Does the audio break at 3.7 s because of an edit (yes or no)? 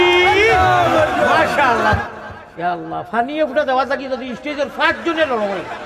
no